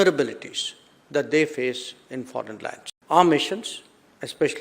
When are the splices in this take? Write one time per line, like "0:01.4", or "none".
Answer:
0:02.9